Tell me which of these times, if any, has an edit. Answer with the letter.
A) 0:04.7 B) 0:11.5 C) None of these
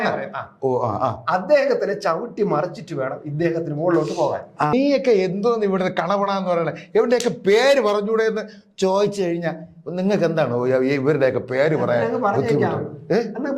A